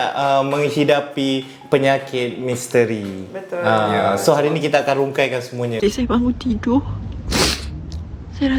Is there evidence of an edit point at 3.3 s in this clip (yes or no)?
no